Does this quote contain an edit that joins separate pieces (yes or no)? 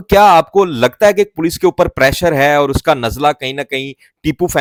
no